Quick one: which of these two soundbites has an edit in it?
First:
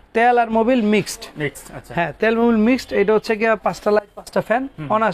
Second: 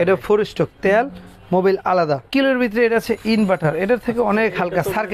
second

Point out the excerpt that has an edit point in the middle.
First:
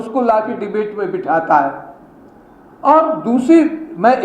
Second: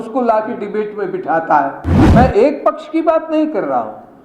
second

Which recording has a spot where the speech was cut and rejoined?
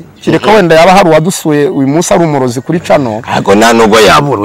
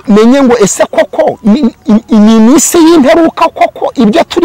second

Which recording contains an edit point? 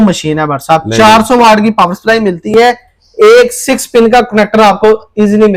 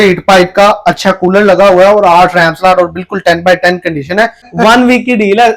second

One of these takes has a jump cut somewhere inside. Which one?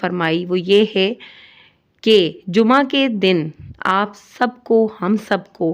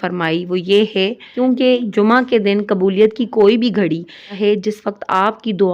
second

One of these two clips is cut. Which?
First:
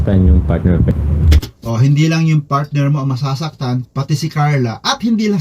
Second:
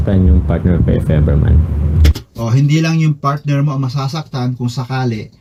first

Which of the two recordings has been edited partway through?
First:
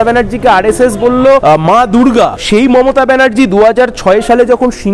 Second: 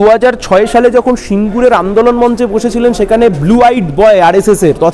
first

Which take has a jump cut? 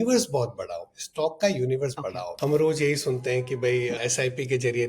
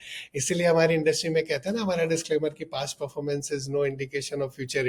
first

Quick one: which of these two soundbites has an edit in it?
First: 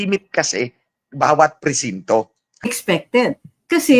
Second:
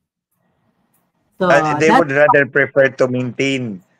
first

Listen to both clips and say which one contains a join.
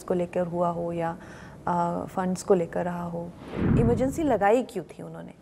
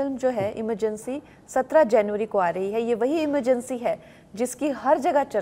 first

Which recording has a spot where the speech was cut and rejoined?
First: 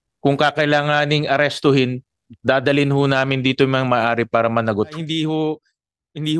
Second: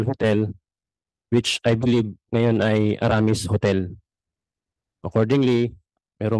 first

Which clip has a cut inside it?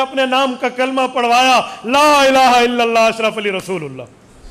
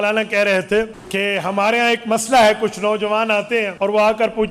second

